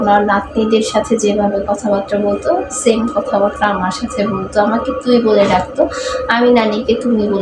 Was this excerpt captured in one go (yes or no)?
yes